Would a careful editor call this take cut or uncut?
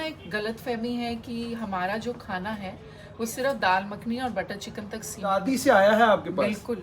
cut